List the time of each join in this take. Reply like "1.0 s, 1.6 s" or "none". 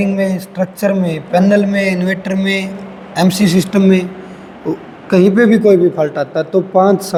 none

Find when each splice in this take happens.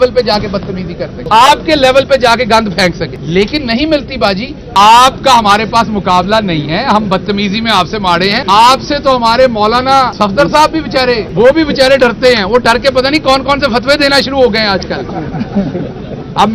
1.2 s, 3.2 s, 4.6 s, 8.4 s, 10.1 s, 11.3 s

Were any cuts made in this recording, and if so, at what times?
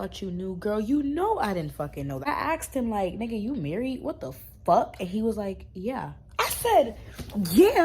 2.3 s

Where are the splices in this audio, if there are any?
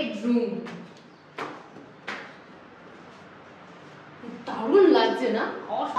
none

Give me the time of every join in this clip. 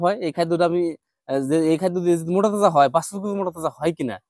none

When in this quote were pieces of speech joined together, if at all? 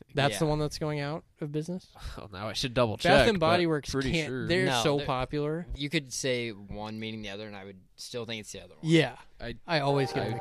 5.7 s

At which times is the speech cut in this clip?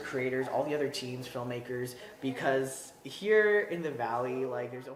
none

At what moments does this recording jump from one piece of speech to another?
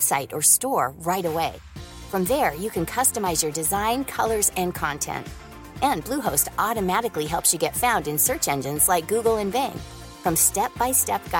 none

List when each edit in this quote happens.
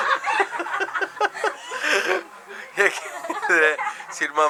none

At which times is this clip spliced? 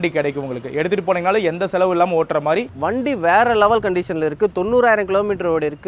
2.7 s

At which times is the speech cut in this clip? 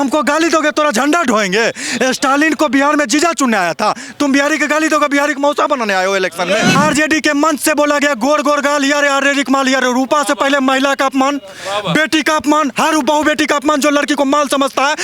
6.8 s

